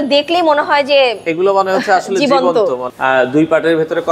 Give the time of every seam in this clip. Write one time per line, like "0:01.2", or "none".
0:02.9